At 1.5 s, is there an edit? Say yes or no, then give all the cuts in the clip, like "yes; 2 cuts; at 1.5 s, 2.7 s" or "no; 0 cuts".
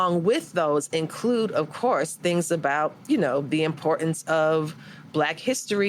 no; 0 cuts